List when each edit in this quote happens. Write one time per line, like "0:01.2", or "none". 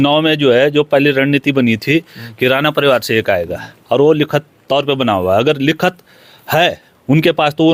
none